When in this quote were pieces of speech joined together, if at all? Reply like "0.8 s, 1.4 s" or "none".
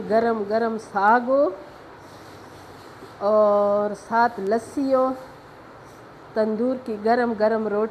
none